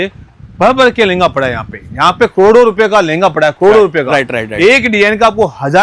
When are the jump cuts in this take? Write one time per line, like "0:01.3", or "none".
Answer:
none